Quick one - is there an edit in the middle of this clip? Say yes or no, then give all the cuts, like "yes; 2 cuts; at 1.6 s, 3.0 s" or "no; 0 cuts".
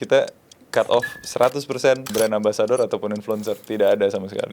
yes; 1 cut; at 2.1 s